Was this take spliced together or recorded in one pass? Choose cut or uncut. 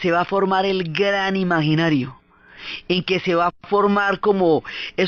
uncut